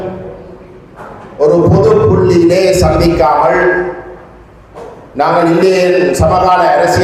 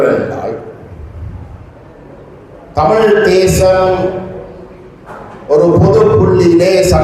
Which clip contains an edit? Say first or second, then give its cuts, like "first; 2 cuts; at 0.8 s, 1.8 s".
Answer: second; 1 cut; at 1.7 s